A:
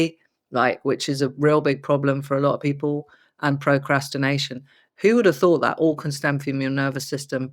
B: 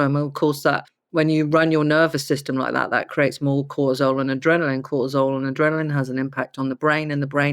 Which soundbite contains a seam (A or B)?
B